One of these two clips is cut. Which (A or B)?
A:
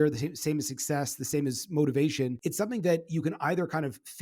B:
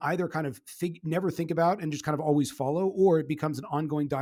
A